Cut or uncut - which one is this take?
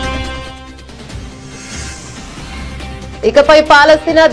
cut